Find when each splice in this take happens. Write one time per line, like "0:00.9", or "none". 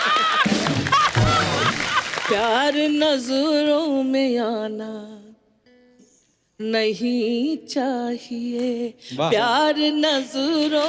0:02.2